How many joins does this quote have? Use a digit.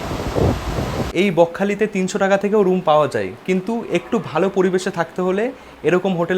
1